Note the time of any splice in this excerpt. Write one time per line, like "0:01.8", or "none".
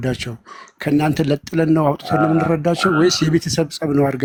none